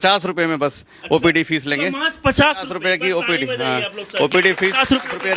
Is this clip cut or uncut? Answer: uncut